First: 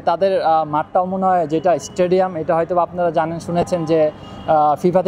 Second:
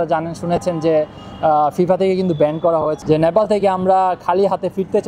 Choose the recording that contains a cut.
second; 1 cut; at 3.0 s

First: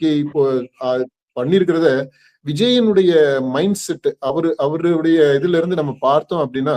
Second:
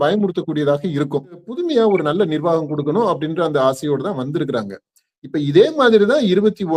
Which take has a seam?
second; 1 cut; at 1.5 s

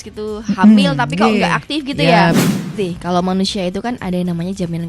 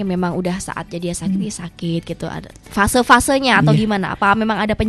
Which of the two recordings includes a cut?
first; 1 cut; at 2.3 s

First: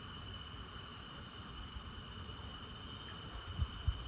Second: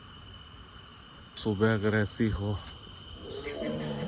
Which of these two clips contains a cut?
second; 1 cut; at 1.4 s

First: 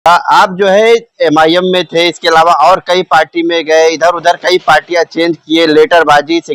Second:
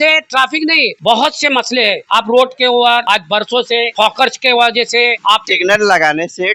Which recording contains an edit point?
second; 5 cuts; at 0.9 s, 2.0 s, 3.0 s, 3.9 s, 5.4 s

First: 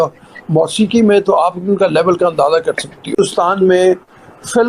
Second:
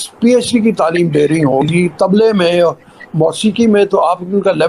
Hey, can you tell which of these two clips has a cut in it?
first; 1 cut; at 3.1 s

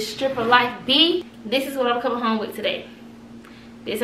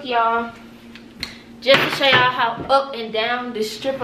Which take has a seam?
first; 1 cut; at 1.3 s

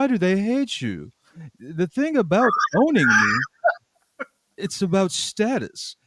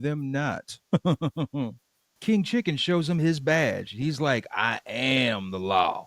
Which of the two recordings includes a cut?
second; 1 cut; at 2.1 s

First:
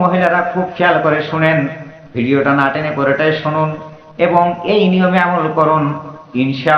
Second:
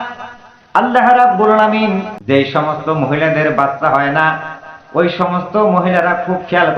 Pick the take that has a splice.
second; 1 cut; at 2.1 s

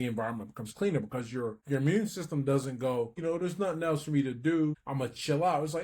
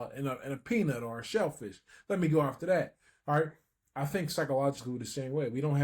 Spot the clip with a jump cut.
first; 3 cuts; at 1.6 s, 3.2 s, 4.8 s

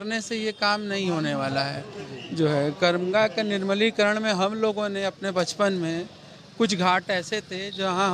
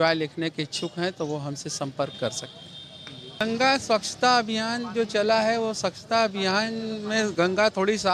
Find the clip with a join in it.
second; 1 cut; at 3.4 s

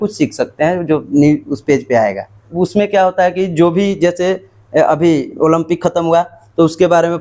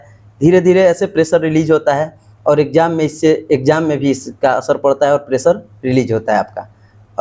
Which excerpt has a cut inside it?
first; 1 cut; at 2.5 s

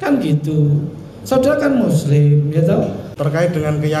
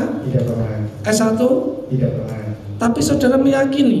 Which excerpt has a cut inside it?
first; 1 cut; at 3.1 s

